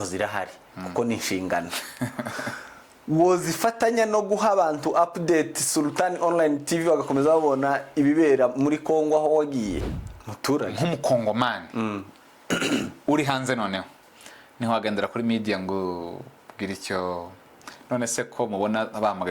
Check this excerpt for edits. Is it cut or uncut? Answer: cut